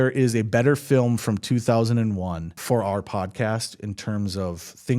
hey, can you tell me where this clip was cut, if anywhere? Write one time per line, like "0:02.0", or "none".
0:02.6